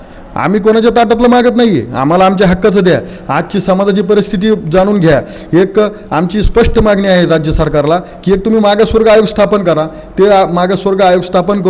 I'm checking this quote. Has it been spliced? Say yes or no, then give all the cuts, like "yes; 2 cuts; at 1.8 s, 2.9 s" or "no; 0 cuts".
no; 0 cuts